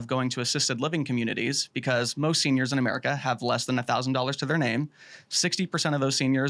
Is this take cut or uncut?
uncut